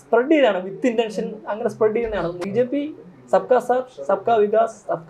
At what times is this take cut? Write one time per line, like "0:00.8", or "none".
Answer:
0:02.4